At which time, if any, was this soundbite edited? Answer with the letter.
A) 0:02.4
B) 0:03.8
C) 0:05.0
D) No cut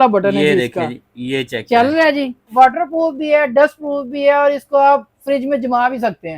A